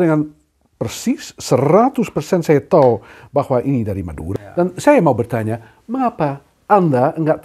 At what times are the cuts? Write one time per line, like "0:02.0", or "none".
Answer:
0:04.2